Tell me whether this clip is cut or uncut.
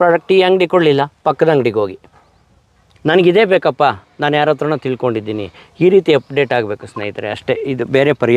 uncut